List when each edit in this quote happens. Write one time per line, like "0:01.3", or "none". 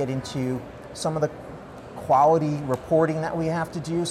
none